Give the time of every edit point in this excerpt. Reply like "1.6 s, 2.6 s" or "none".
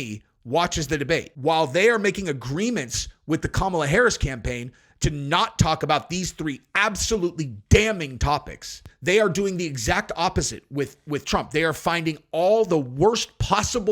1.3 s